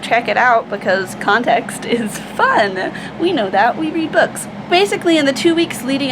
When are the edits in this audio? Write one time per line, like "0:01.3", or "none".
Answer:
0:04.7